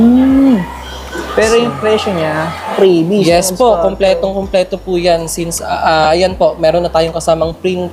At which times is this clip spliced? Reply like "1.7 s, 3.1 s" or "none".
2.7 s